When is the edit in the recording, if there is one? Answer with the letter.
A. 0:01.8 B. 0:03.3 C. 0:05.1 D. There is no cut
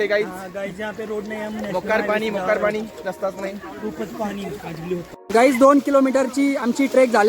C